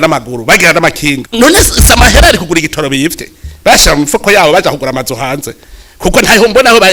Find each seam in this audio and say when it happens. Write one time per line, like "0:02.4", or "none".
0:01.2